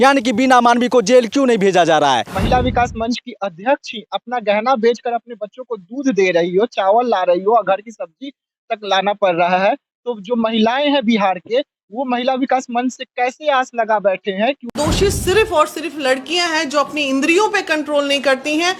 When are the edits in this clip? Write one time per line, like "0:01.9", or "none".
0:02.3
0:14.7